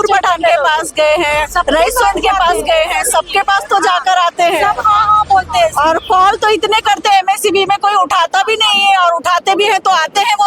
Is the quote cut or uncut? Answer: uncut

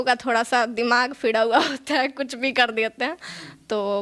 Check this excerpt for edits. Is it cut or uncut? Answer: uncut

